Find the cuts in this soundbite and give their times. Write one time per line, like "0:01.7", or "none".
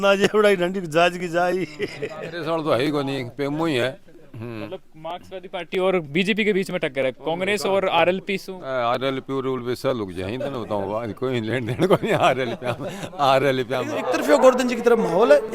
0:02.2
0:14.0